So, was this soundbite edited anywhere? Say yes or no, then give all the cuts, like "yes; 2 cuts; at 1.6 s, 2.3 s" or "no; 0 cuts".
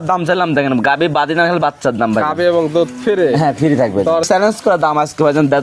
yes; 1 cut; at 4.2 s